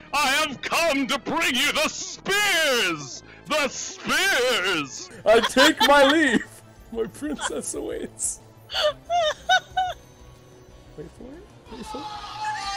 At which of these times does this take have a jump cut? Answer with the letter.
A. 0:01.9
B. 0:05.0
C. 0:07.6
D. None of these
B